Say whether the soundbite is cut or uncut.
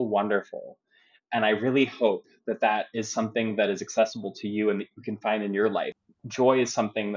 cut